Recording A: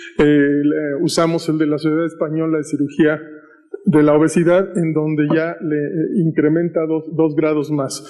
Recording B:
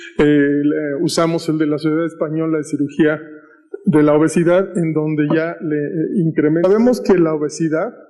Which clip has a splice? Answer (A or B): A